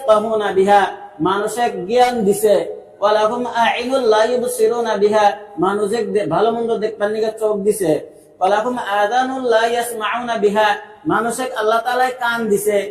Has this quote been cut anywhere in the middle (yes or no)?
no